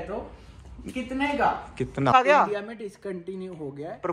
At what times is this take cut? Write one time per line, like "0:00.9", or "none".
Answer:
0:02.1